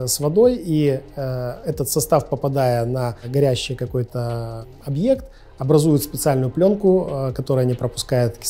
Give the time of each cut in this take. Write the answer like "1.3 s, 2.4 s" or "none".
3.2 s, 4.7 s